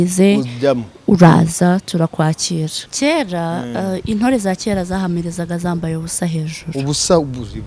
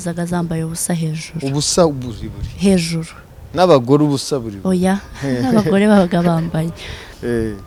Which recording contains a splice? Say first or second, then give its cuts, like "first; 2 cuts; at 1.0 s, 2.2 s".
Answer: first; 1 cut; at 2.9 s